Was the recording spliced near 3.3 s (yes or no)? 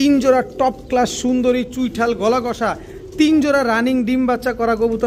no